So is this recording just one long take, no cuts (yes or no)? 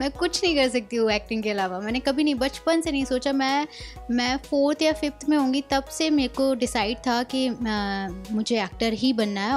yes